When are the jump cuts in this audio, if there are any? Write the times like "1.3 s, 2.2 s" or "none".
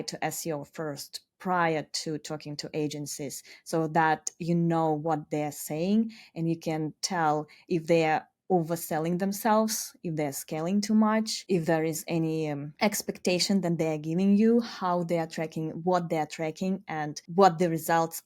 11.4 s, 12.7 s, 17.2 s